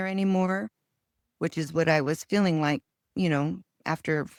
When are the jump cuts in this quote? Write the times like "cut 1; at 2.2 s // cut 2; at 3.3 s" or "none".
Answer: none